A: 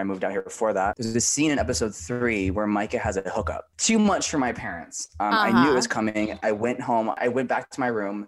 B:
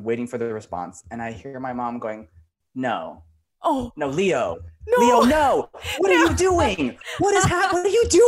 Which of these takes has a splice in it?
A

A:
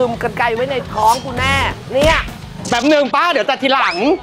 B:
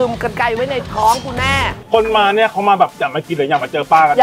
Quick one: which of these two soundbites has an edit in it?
B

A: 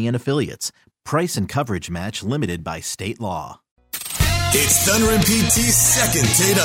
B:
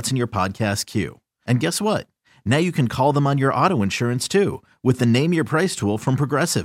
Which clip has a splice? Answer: A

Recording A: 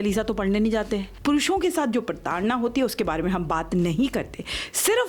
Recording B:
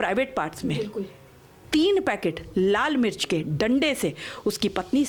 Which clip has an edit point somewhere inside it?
A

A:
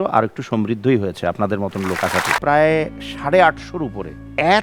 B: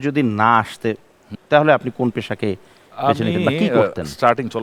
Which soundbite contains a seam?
A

